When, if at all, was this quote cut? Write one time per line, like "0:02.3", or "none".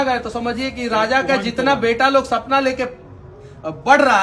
none